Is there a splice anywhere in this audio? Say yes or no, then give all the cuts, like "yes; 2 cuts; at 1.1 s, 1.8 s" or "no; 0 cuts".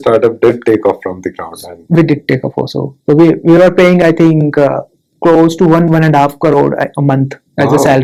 no; 0 cuts